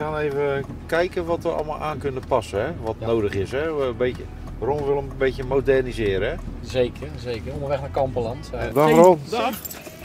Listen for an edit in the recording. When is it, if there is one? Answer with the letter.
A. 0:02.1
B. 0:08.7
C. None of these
B